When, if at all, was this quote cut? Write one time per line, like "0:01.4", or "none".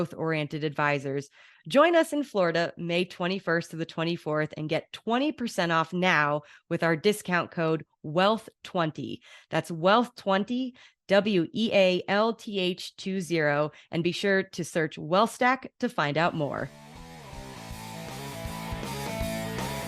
0:16.8